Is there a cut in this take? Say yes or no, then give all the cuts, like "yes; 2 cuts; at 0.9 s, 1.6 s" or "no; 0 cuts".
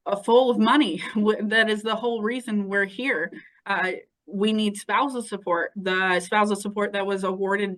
no; 0 cuts